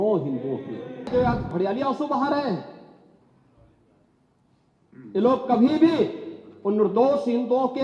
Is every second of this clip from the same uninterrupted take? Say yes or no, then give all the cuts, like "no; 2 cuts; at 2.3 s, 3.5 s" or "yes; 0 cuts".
no; 1 cut; at 1.1 s